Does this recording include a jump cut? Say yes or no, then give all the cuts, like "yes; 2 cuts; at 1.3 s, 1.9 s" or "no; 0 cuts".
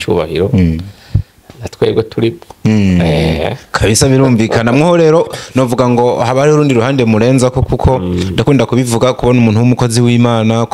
no; 0 cuts